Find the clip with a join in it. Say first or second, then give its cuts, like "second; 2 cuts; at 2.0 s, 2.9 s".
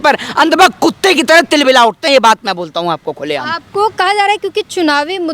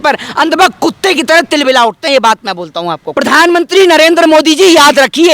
second; 1 cut; at 3.0 s